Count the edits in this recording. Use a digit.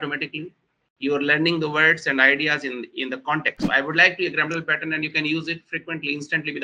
1